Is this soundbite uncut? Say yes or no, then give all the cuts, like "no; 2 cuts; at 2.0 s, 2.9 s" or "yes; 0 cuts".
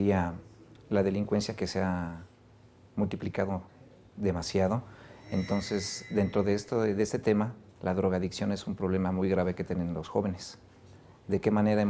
yes; 0 cuts